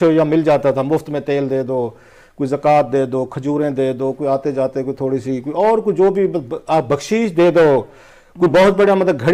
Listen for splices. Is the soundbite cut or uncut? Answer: uncut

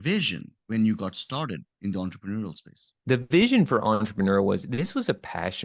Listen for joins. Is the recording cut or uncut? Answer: cut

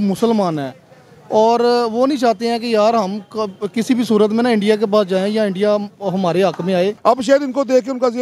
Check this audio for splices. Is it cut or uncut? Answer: cut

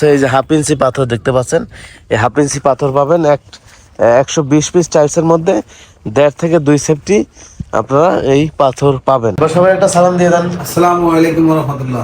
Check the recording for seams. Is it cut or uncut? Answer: cut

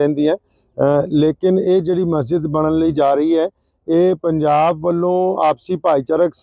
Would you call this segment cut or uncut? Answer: uncut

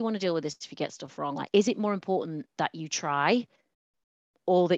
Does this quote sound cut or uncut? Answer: uncut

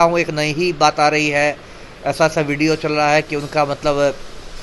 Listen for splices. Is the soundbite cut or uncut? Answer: uncut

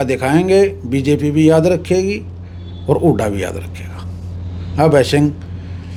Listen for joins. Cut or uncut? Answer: uncut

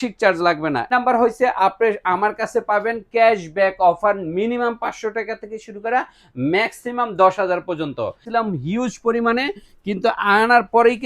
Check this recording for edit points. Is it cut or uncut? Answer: cut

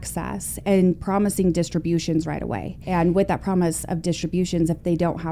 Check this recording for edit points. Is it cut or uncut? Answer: cut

